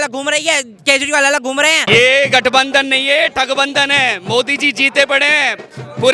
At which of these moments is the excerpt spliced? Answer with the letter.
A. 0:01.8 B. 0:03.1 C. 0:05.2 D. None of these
A